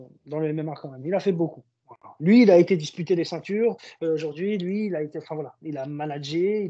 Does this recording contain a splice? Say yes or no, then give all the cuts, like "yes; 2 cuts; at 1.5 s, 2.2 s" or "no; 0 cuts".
no; 0 cuts